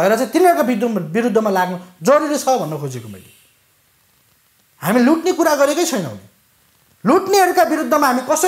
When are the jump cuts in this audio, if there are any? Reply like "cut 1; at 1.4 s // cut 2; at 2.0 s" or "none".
none